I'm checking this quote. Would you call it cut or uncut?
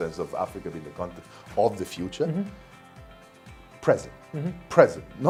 uncut